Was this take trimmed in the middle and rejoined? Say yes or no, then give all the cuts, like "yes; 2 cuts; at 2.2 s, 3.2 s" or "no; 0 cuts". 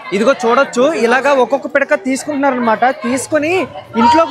no; 0 cuts